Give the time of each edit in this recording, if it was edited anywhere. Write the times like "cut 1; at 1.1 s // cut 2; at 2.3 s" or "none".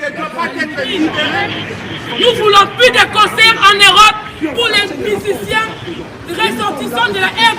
cut 1; at 1.4 s